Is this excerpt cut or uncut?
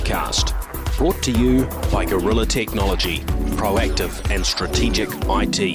uncut